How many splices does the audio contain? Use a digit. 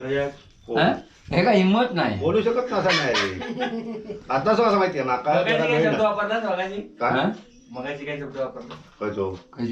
0